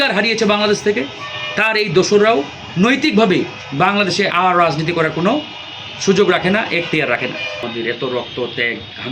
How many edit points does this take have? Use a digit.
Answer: 1